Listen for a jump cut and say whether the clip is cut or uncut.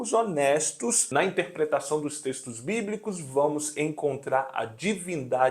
cut